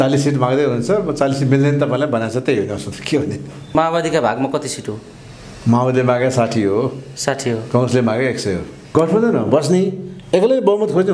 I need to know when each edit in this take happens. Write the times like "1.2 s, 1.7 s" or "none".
3.7 s, 8.9 s